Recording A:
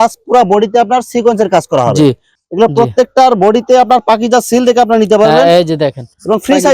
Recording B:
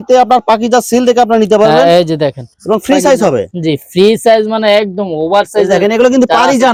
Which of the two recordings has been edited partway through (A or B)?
A